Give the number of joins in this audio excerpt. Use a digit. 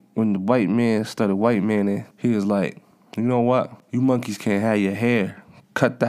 2